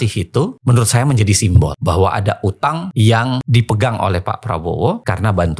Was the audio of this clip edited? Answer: no; 0 cuts

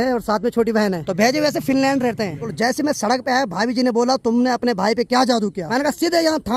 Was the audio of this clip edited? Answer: yes; 3 cuts; at 1.0 s, 2.5 s, 5.6 s

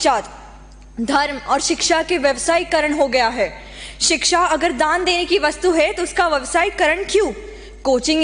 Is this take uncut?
yes; 0 cuts

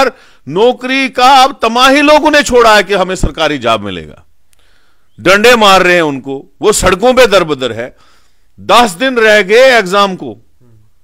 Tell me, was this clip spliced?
no; 0 cuts

